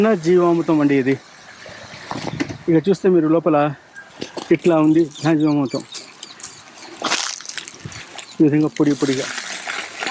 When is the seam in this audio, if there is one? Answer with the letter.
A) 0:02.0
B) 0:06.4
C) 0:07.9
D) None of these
D